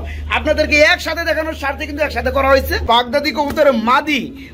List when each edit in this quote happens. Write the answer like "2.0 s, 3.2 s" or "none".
2.8 s